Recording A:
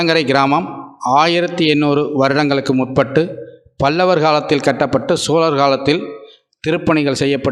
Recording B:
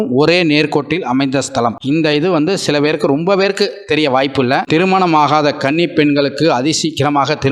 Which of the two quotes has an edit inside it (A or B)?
B